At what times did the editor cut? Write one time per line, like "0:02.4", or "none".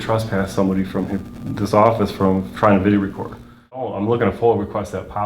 0:03.9